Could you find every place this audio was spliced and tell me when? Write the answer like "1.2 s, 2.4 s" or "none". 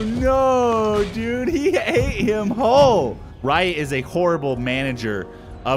3.3 s